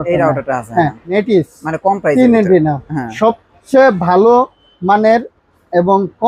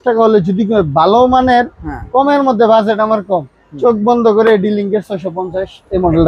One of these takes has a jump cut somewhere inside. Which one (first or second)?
first